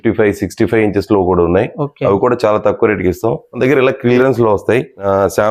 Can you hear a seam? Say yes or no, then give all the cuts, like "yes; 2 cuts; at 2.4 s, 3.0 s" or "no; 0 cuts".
no; 0 cuts